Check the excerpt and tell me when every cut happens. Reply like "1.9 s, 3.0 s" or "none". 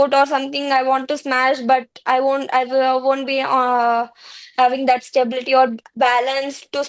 none